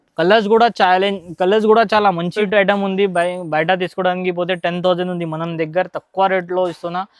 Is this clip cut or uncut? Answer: cut